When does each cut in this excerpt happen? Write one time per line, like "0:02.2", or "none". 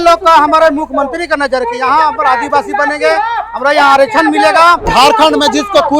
0:04.9